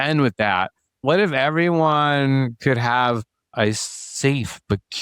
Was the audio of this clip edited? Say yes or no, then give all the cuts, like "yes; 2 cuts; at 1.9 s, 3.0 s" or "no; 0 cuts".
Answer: yes; 1 cut; at 1.0 s